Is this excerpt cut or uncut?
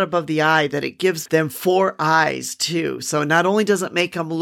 cut